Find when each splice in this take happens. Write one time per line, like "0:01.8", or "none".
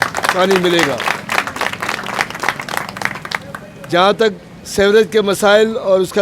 none